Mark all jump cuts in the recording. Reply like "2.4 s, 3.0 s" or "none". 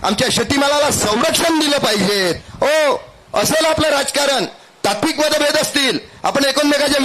2.4 s